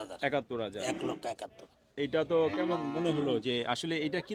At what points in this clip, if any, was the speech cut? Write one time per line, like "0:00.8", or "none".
none